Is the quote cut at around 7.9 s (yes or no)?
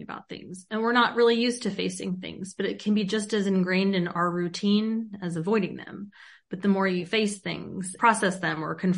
yes